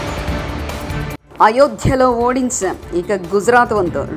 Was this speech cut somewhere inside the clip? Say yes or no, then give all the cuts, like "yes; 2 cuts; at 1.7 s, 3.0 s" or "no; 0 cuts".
yes; 1 cut; at 1.1 s